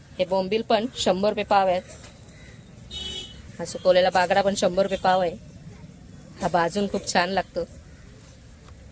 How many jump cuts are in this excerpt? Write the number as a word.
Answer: one